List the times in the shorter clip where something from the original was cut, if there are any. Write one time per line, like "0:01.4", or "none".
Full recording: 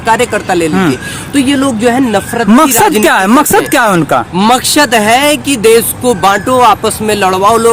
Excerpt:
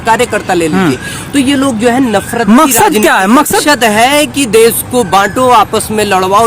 0:03.6